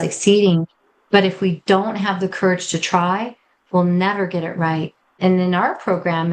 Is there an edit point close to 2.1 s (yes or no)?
no